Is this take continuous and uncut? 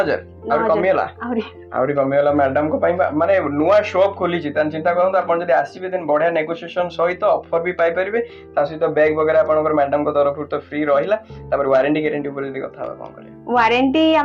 yes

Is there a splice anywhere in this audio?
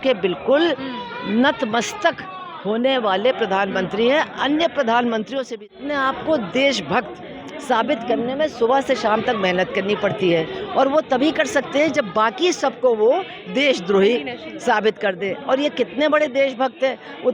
yes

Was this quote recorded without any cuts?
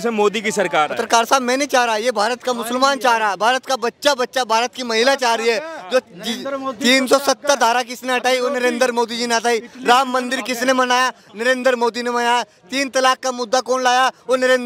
yes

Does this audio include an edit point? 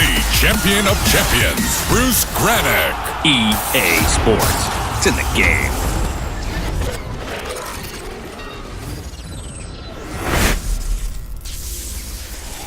no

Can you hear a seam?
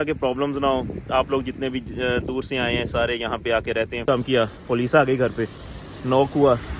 yes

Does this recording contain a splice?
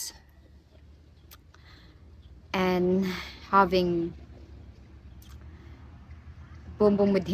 no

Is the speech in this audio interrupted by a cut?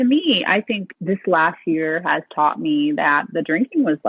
yes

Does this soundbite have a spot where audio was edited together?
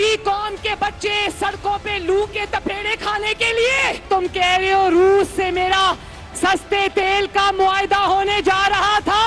yes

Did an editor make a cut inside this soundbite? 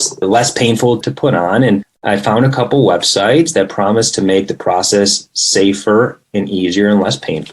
yes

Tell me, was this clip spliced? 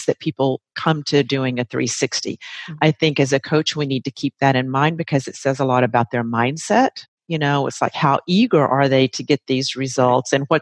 no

